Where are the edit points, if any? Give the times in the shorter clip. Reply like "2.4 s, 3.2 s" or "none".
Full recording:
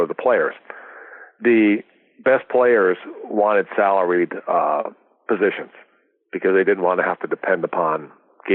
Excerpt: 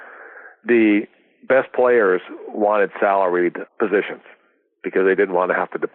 3.6 s